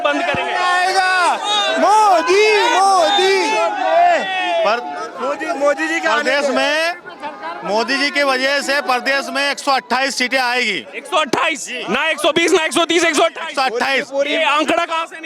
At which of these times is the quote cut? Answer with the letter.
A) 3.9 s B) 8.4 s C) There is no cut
C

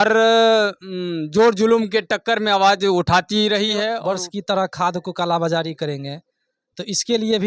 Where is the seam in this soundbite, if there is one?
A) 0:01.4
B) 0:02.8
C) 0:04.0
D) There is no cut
C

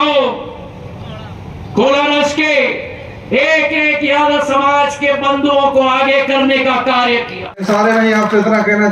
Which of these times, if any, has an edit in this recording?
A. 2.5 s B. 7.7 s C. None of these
B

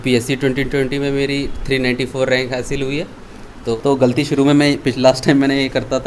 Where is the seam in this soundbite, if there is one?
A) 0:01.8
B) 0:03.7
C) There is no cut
B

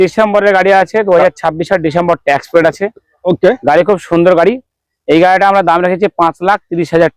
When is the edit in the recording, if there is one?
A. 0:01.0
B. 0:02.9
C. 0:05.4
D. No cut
D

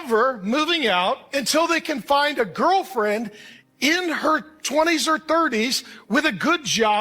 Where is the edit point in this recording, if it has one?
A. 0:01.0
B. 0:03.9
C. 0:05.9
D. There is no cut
D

